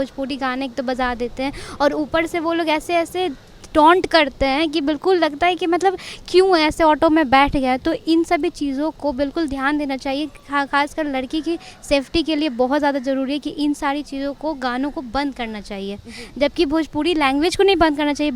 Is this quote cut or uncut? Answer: uncut